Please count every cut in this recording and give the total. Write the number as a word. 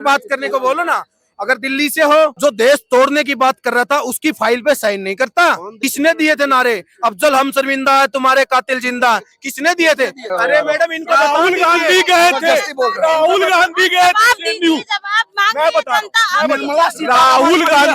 three